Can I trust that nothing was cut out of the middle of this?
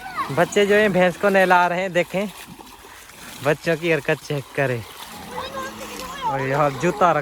yes; 0 cuts

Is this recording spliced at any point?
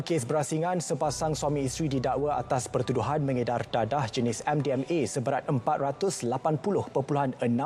no; 0 cuts

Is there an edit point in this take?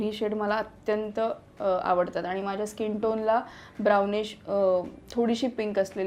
no; 0 cuts

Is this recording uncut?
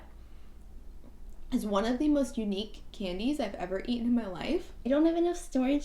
no; 1 cut; at 4.8 s

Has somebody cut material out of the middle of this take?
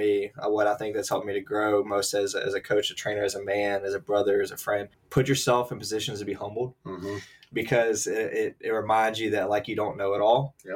yes; 1 cut; at 5.0 s

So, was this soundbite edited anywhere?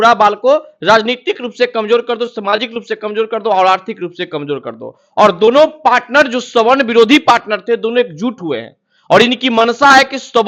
no; 0 cuts

